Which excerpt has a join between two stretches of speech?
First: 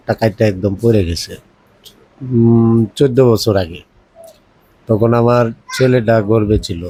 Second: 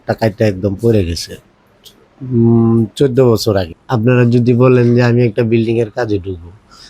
second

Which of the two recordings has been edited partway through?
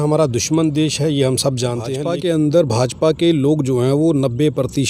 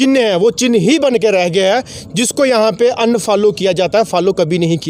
first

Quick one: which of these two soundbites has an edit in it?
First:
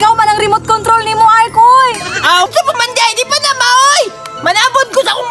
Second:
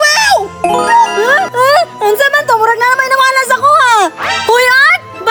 first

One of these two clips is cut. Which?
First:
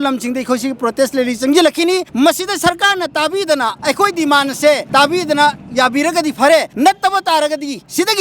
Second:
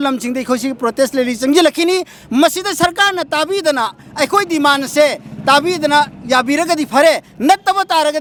first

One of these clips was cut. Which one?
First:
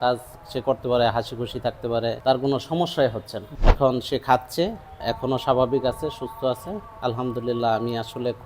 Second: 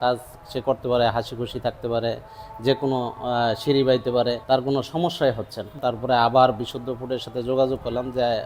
first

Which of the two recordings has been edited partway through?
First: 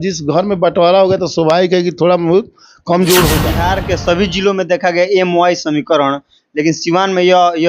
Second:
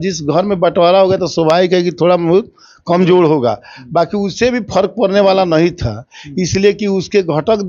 first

